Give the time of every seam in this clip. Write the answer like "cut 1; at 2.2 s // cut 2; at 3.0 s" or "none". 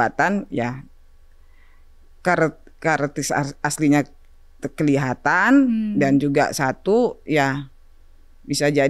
none